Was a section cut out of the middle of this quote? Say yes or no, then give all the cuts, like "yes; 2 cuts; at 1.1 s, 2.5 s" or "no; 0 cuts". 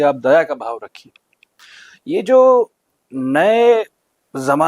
no; 0 cuts